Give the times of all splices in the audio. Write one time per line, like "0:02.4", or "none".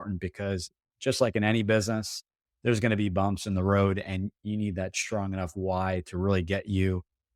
none